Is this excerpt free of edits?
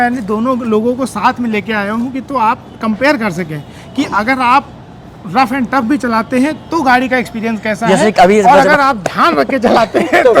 yes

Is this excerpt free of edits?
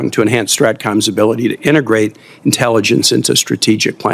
yes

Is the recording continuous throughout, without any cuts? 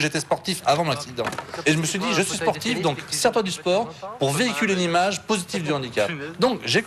yes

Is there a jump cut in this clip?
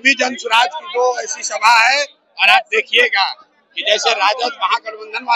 no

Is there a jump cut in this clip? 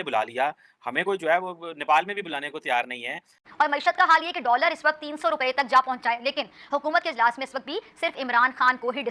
yes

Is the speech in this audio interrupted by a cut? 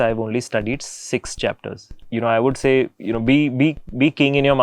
yes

